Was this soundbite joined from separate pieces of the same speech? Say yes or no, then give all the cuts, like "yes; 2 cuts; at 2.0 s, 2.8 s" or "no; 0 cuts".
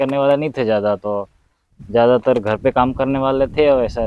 no; 0 cuts